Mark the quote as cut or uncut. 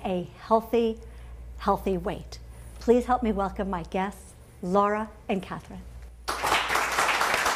cut